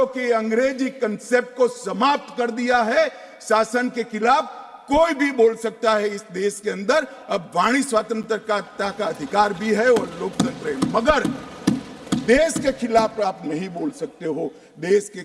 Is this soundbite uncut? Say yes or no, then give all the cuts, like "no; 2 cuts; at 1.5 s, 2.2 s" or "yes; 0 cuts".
yes; 0 cuts